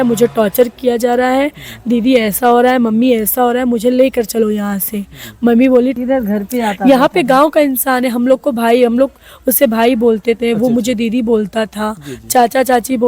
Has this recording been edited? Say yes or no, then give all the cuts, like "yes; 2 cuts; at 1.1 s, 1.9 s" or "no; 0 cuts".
yes; 1 cut; at 6.0 s